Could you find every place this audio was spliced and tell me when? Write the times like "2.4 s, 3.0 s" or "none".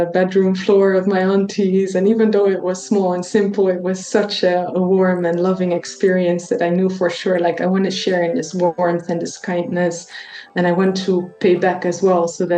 none